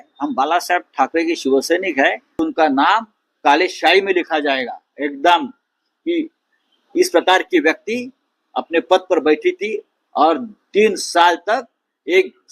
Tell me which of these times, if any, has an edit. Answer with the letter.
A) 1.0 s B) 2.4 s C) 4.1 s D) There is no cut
B